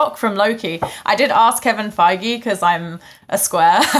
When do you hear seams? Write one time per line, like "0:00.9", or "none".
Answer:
none

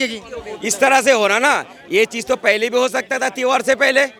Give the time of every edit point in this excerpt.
none

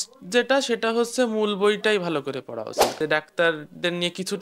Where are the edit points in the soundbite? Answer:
0:02.9

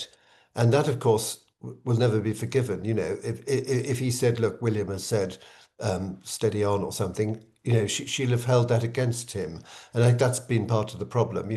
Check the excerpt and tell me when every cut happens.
none

